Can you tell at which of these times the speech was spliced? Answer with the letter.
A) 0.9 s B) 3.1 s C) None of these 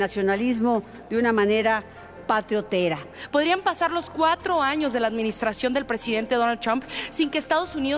B